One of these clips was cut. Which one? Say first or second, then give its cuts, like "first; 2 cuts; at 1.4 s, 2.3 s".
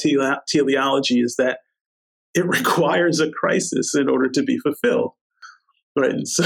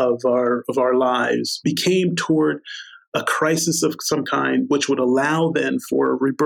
second; 1 cut; at 1.5 s